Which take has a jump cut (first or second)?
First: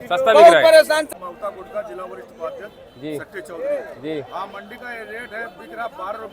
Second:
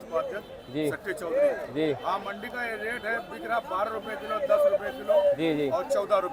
first